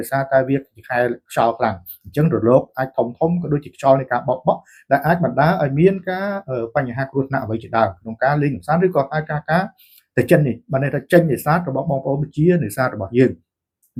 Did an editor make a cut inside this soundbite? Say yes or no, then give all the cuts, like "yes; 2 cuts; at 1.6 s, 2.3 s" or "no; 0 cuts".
no; 0 cuts